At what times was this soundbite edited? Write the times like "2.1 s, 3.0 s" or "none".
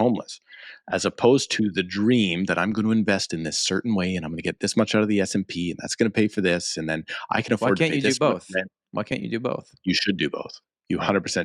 none